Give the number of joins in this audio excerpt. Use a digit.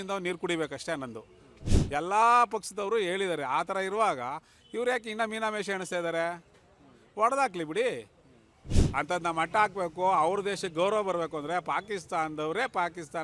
2